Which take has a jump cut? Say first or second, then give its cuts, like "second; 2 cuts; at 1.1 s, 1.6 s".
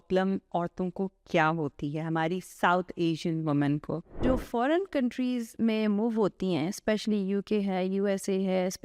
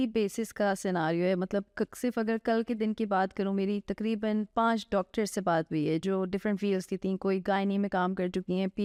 first; 1 cut; at 4.2 s